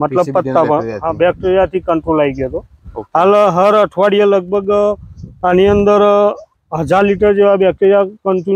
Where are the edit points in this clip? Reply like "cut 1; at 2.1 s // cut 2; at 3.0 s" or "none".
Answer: none